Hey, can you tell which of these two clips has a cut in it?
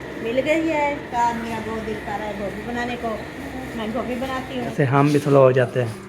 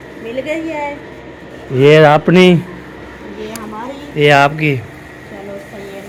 first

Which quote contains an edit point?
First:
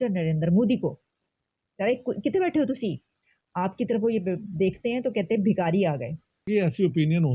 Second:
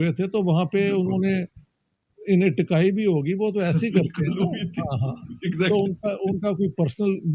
first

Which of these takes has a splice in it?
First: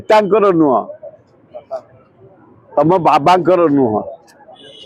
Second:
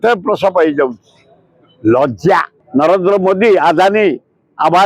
second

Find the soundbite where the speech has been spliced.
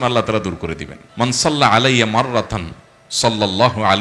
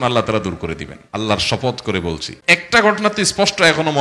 second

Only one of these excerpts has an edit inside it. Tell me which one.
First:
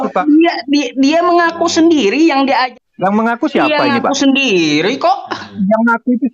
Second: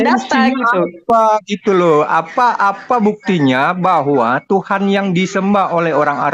first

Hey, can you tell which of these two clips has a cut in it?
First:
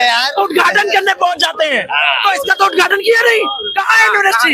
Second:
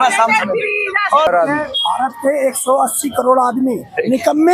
second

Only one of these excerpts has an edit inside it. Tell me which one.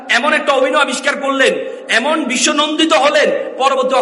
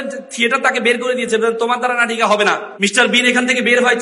second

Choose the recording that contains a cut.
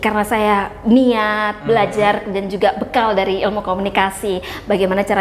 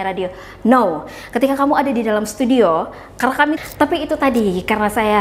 second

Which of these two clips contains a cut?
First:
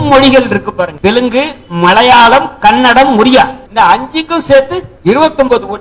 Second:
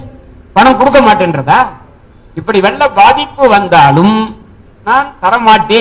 first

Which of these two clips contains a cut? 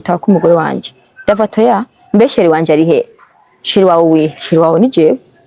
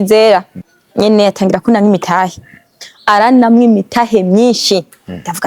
second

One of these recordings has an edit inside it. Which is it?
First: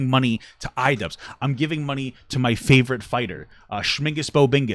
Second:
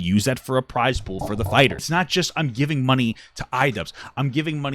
second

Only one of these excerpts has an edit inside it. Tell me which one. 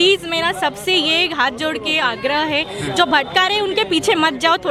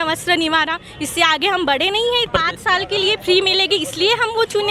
second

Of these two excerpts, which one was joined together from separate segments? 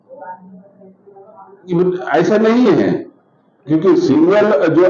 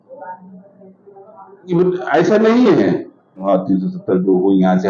second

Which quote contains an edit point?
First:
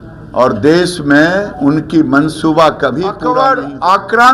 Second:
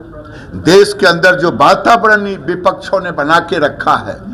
first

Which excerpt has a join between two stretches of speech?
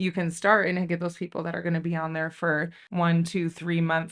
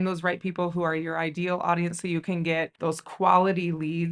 first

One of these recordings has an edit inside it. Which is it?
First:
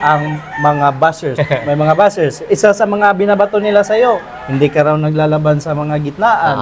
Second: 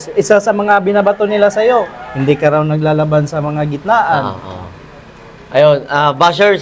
first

